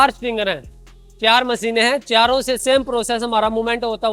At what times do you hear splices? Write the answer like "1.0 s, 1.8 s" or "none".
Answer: none